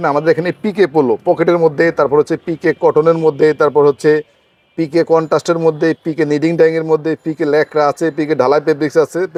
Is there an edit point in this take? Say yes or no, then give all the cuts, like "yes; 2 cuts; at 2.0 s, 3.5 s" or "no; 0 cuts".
no; 0 cuts